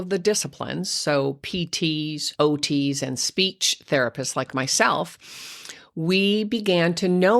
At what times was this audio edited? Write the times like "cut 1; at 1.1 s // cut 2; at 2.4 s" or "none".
cut 1; at 2.2 s